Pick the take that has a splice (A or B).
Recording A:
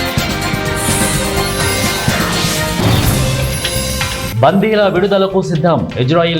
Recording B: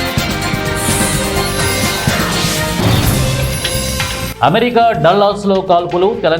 A